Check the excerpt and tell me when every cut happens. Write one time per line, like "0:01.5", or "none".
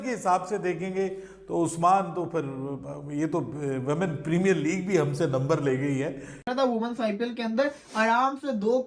0:06.5

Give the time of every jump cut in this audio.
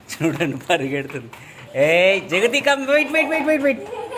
none

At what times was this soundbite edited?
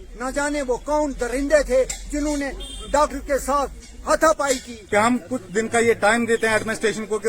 0:04.7

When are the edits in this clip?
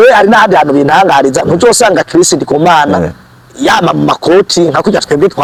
none

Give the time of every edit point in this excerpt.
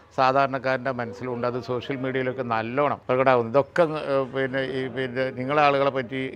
0:03.0

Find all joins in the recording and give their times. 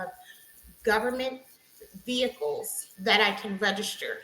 0:02.8

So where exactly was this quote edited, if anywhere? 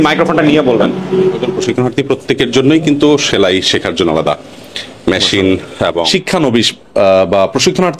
0:01.5
0:06.1

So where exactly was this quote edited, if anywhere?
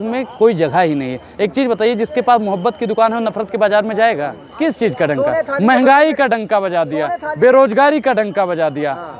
0:04.4

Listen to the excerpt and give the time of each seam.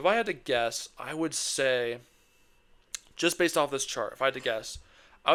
none

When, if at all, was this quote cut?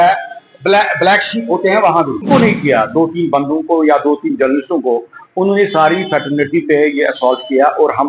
0:02.2

